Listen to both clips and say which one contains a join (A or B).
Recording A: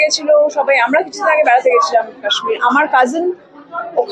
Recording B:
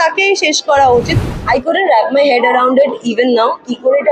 B